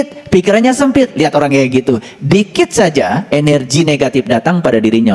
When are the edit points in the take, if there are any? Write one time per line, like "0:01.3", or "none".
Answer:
none